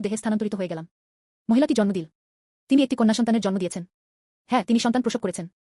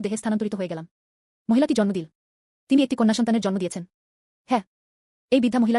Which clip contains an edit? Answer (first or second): second